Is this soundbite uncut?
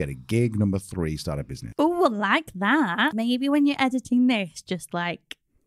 no; 2 cuts; at 1.5 s, 3.1 s

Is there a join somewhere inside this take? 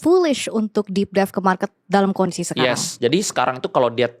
no; 0 cuts

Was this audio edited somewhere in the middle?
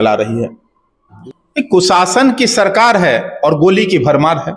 yes; 1 cut; at 1.1 s

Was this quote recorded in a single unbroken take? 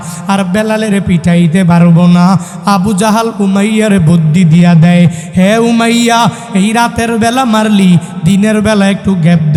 yes; 0 cuts

